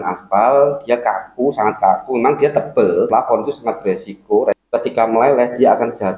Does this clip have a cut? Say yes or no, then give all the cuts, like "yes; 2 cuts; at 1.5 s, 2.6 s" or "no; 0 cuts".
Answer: yes; 2 cuts; at 3.1 s, 4.6 s